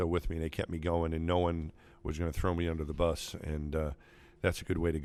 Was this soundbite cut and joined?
no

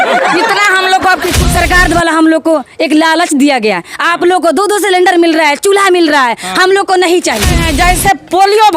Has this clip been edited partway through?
yes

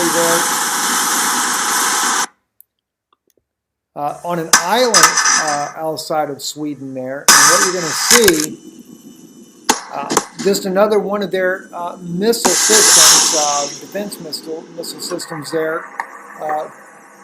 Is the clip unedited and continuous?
no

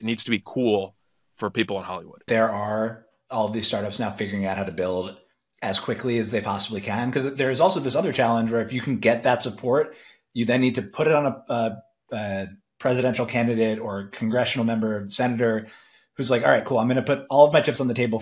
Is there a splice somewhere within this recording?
yes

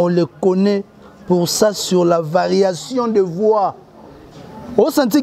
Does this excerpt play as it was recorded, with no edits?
yes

